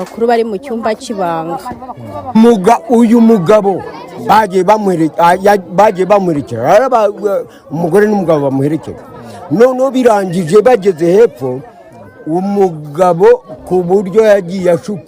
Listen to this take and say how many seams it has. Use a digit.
1